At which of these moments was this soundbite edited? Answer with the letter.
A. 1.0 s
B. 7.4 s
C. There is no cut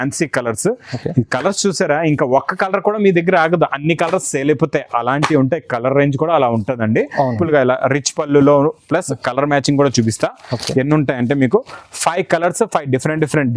B